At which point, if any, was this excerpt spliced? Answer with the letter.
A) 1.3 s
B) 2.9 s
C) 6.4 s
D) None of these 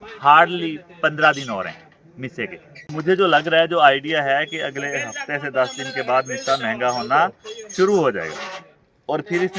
B